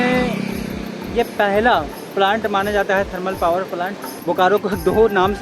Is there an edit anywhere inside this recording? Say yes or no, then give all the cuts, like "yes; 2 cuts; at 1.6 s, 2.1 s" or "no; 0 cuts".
yes; 1 cut; at 4.1 s